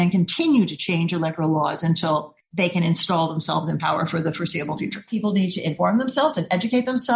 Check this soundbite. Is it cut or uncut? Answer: cut